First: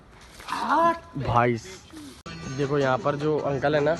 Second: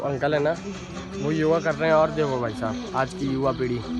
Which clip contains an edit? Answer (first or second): first